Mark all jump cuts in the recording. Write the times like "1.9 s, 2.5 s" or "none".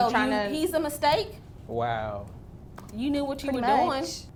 none